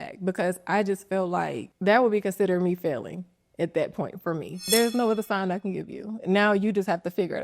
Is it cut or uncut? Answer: cut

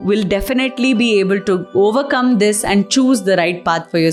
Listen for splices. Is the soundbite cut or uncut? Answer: uncut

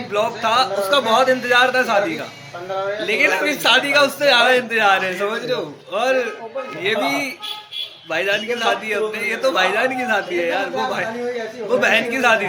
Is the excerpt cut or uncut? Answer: uncut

